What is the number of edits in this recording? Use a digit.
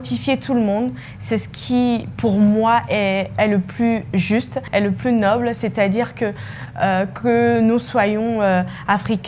1